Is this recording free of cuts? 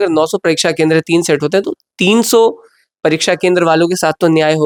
yes; 0 cuts

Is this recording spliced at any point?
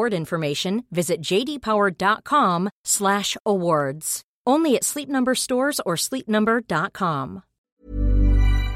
yes; 1 cut; at 7.7 s

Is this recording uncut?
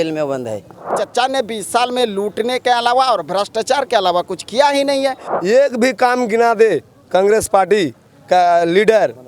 no; 2 cuts; at 1.0 s, 5.3 s

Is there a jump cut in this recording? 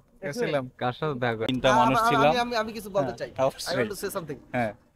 yes; 1 cut; at 1.5 s

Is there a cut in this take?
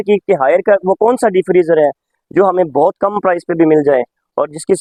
no; 0 cuts

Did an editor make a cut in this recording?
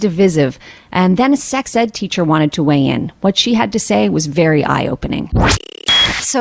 no; 0 cuts

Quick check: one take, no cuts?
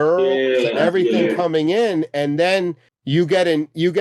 no; 1 cut; at 2.9 s

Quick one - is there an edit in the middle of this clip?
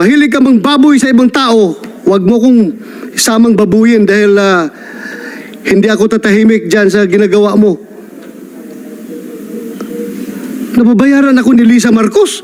no; 0 cuts

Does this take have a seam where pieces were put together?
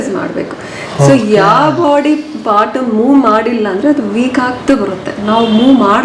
no; 0 cuts

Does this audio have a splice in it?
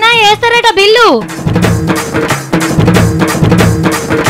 yes; 1 cut; at 3.4 s

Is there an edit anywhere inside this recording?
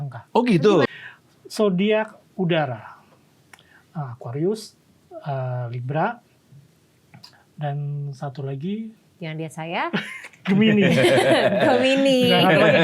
yes; 1 cut; at 1.0 s

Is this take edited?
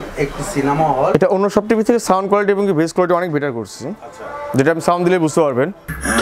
yes; 1 cut; at 1.1 s

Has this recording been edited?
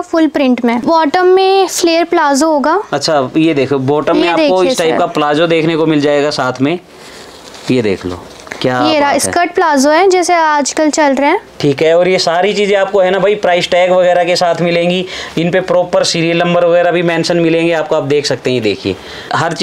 no; 0 cuts

